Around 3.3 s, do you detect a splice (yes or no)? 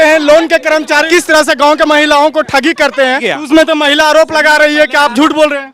yes